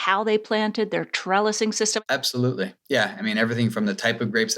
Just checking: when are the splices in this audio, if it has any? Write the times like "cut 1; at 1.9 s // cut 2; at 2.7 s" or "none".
cut 1; at 2.0 s